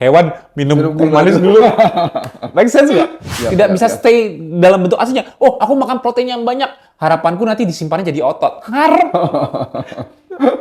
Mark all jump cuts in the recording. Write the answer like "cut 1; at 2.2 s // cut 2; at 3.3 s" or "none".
cut 1; at 3.3 s